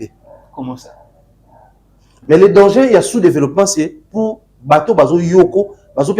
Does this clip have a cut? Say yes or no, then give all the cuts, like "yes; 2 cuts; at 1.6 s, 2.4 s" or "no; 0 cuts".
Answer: yes; 1 cut; at 2.3 s